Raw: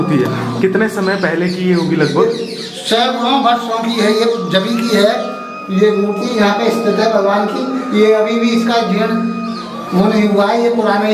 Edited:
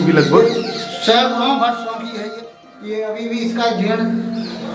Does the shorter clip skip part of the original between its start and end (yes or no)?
yes